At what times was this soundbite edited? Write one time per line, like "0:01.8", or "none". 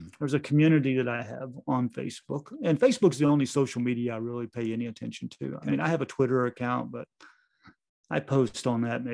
none